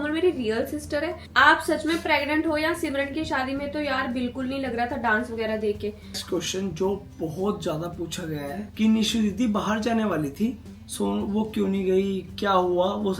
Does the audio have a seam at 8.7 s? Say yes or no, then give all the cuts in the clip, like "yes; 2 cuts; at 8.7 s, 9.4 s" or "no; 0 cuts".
yes; 3 cuts; at 1.2 s, 6.2 s, 8.7 s